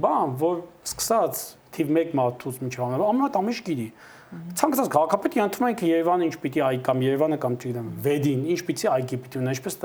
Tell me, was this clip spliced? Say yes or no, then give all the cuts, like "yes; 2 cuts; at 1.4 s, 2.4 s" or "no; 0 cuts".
no; 0 cuts